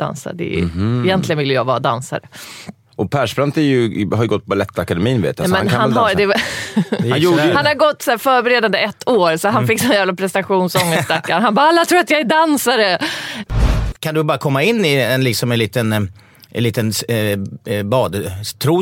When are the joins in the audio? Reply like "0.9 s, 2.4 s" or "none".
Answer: 13.6 s